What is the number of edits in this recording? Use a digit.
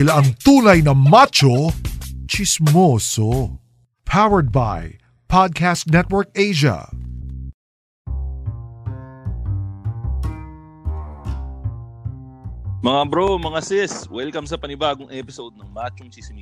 1